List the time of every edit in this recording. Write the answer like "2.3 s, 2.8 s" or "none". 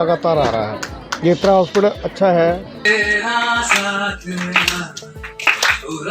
2.8 s